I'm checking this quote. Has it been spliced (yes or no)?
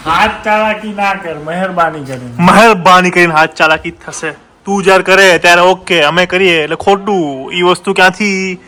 no